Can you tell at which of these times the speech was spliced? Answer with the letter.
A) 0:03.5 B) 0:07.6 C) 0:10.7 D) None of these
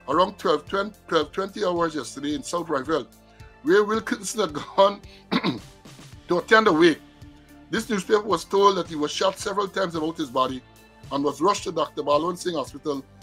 D